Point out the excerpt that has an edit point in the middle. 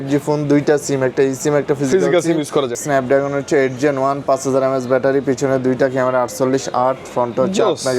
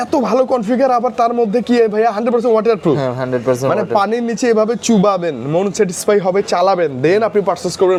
first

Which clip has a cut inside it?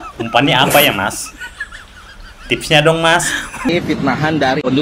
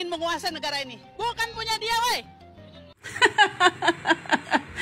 first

